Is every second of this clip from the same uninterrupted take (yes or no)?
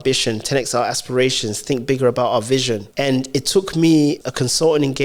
no